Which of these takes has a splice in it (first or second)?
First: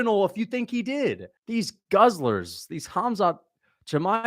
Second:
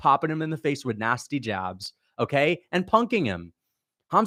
first